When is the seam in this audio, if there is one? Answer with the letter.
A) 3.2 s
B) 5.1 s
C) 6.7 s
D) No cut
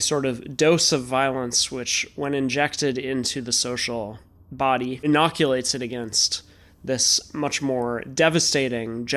B